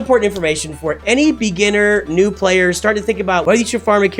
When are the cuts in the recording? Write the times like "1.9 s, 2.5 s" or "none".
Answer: 1.0 s, 3.4 s